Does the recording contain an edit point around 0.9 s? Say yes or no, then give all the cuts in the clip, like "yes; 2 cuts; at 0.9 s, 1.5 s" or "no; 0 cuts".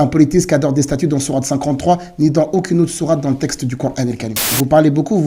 no; 1 cut; at 4.3 s